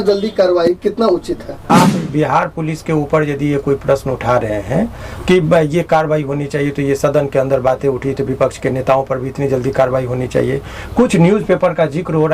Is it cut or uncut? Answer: cut